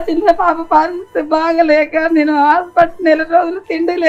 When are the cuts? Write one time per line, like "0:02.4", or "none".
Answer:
none